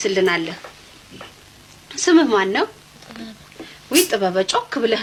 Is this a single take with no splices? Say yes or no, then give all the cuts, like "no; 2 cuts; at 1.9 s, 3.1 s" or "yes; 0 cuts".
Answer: yes; 0 cuts